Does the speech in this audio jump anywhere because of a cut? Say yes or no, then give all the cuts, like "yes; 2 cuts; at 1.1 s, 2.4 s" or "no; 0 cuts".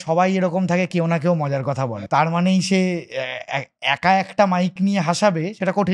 yes; 1 cut; at 1.9 s